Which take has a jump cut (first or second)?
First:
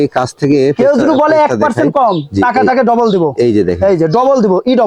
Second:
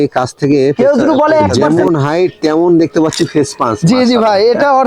second